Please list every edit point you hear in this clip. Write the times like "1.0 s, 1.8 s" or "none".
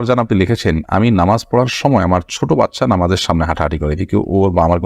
none